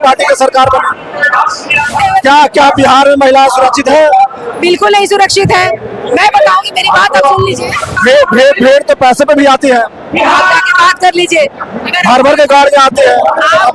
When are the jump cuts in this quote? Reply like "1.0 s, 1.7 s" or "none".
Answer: 1.9 s, 7.9 s